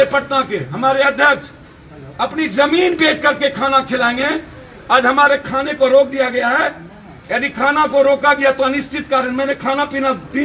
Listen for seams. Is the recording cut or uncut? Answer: uncut